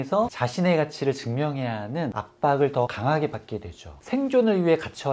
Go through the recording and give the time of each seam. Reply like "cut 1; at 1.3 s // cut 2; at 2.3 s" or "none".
cut 1; at 4.0 s

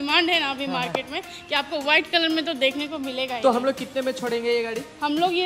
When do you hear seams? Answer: none

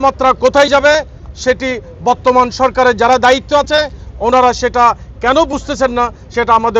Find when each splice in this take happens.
none

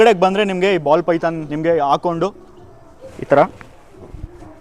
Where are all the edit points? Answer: cut 1; at 1.5 s

